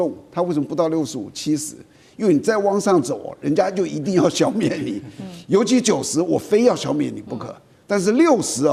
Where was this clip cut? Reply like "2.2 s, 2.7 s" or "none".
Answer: none